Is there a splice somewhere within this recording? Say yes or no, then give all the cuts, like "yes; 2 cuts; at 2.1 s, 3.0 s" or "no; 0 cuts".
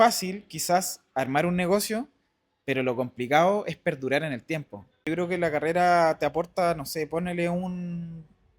yes; 1 cut; at 5.0 s